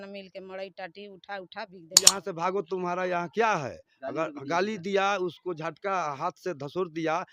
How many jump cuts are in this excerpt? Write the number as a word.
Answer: one